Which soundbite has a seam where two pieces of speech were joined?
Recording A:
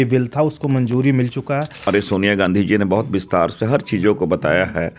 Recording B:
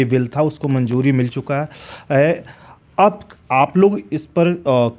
A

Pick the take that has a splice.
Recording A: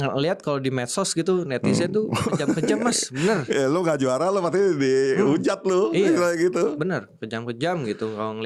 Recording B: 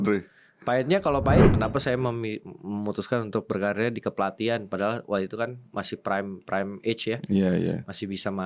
B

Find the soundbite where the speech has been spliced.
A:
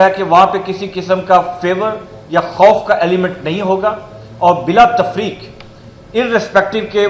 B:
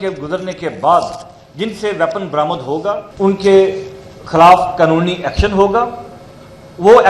B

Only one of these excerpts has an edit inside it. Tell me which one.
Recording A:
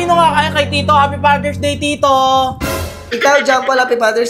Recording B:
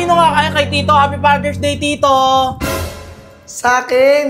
A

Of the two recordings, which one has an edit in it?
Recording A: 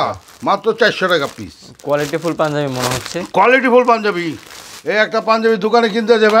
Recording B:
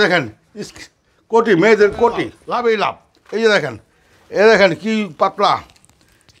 B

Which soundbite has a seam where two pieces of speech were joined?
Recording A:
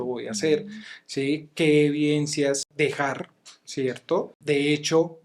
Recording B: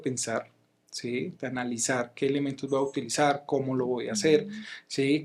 A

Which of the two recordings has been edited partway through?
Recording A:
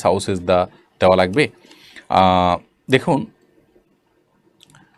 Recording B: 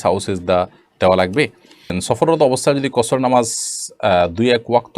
B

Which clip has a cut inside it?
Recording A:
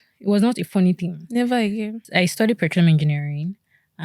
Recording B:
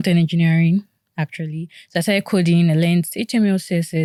A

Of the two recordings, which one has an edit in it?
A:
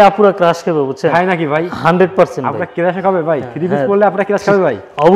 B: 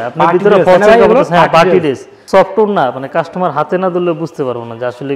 B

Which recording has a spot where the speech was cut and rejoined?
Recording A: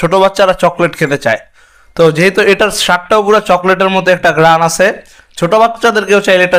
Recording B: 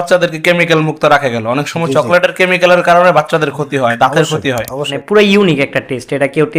B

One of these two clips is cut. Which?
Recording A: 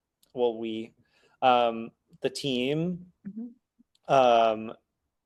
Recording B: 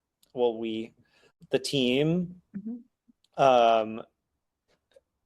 B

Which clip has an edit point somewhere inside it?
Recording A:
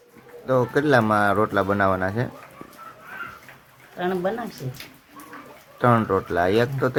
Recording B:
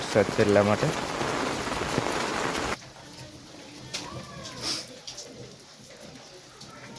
B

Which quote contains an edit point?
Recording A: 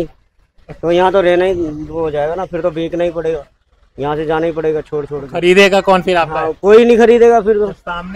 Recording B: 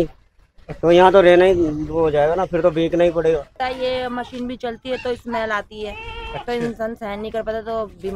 B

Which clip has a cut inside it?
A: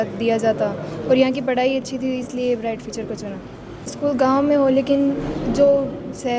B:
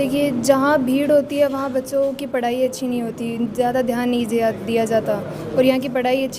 A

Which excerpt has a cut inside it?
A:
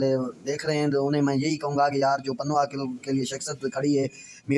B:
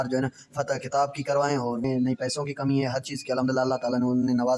B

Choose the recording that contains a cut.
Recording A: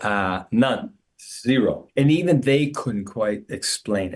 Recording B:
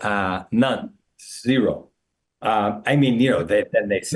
A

